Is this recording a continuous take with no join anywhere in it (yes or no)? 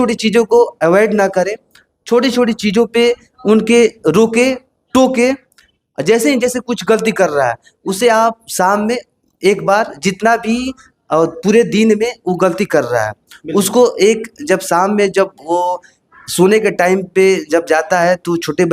yes